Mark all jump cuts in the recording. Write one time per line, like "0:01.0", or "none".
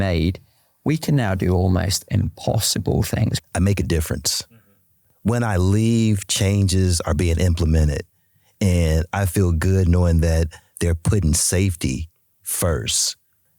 0:03.3